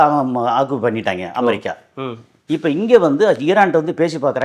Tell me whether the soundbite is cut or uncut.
uncut